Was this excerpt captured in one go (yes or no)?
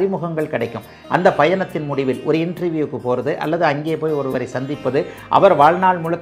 no